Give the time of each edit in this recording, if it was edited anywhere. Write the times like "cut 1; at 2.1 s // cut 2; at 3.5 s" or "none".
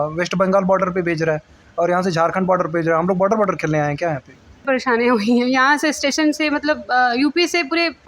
cut 1; at 4.6 s